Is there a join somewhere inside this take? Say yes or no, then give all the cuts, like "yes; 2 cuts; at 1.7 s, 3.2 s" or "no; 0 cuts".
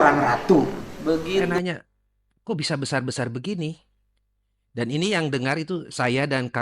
yes; 1 cut; at 1.5 s